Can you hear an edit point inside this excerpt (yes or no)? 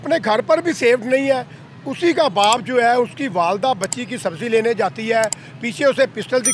no